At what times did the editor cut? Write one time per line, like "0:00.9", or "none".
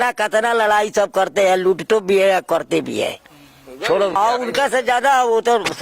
0:04.2